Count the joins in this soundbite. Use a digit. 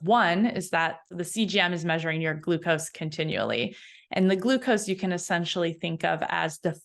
1